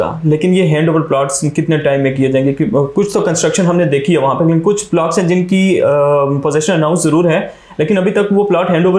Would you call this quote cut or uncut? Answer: uncut